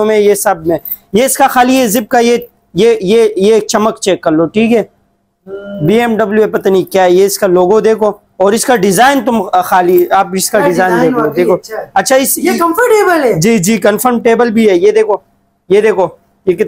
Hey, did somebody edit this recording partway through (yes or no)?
no